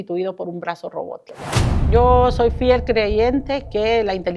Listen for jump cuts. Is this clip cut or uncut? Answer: cut